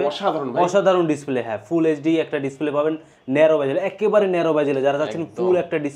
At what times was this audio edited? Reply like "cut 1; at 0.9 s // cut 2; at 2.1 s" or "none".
none